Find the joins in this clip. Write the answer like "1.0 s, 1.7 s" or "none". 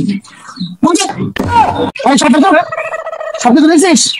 1.9 s